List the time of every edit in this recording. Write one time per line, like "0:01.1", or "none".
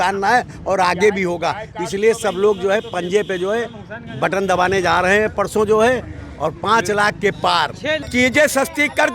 0:08.0